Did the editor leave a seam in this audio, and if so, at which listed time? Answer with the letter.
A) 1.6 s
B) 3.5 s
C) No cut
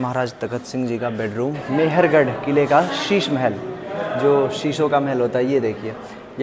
A